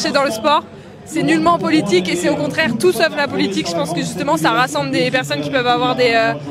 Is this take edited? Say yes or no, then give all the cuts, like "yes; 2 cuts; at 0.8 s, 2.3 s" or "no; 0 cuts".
no; 0 cuts